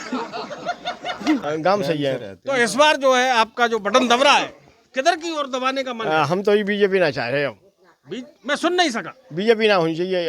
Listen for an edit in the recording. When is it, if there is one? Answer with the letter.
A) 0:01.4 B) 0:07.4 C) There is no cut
A